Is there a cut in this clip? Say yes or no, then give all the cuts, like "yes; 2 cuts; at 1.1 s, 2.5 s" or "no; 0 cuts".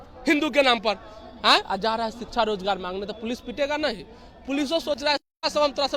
no; 0 cuts